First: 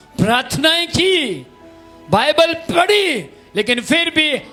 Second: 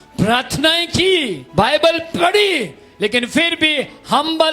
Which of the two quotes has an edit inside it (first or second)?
second